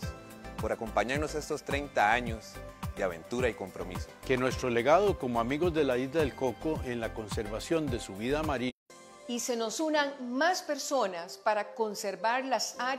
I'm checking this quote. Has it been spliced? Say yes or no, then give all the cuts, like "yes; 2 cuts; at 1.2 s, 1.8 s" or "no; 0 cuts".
yes; 1 cut; at 8.7 s